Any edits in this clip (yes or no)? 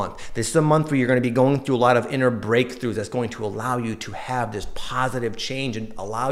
no